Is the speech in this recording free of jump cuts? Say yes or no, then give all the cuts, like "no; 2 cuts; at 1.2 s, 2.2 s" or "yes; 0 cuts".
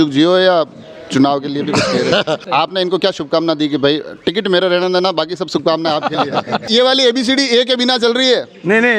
no; 2 cuts; at 2.4 s, 6.7 s